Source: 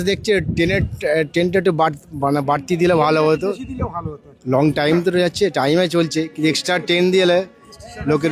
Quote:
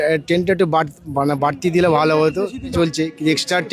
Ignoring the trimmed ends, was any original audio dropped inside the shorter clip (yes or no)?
yes